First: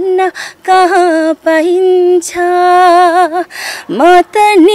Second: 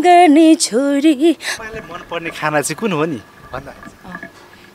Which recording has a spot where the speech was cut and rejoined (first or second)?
second